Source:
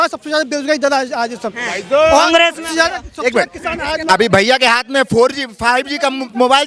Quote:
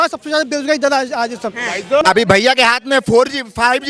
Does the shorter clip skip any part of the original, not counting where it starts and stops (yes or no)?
yes